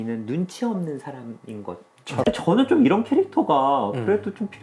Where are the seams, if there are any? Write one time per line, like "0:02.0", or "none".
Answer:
0:02.1